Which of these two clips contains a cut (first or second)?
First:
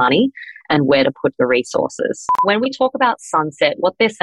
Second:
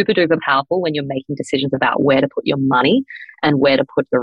first